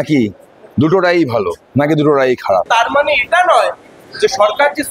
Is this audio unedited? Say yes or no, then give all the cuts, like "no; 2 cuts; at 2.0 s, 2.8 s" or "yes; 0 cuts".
no; 1 cut; at 2.7 s